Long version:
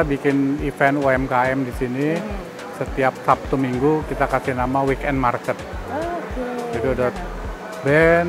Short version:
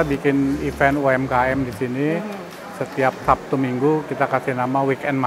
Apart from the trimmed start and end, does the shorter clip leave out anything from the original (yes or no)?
no